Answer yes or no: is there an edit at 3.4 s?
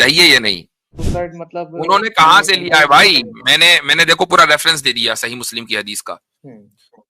no